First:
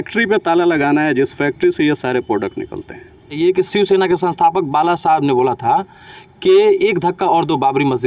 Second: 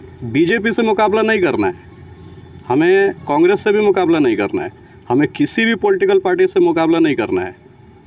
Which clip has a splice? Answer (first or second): first